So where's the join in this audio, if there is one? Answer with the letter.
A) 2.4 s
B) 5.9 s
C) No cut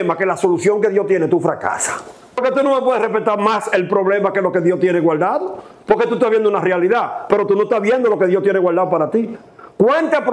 A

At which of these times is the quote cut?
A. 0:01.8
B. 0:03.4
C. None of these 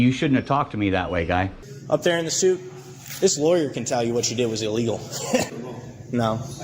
A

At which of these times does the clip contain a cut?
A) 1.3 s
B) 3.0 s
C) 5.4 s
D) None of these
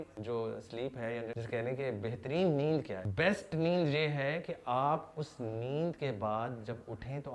B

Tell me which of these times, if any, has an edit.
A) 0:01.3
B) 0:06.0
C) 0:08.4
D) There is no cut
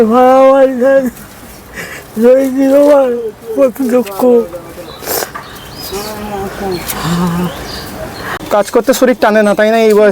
C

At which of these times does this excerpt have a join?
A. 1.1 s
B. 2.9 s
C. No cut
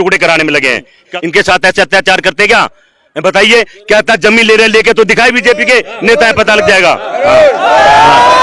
A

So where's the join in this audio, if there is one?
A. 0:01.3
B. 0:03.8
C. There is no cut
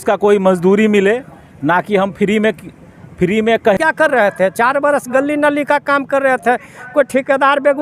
B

